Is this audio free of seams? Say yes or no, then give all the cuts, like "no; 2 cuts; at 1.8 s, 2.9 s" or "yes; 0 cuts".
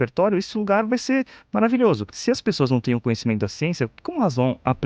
no; 1 cut; at 2.1 s